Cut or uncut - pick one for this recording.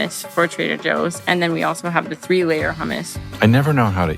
cut